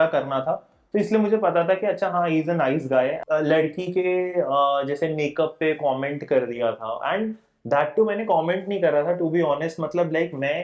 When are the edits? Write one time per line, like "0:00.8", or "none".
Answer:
0:03.2